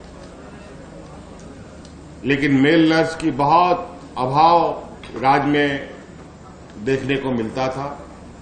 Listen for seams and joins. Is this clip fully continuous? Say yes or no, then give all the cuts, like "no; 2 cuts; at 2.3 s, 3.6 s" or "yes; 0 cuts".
yes; 0 cuts